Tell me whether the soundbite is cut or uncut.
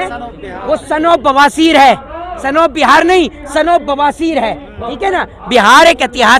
uncut